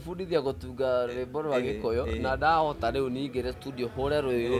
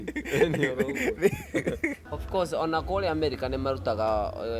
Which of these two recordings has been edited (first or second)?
second